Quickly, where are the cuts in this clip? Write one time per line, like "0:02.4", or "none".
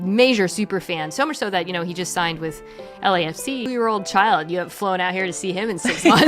0:03.6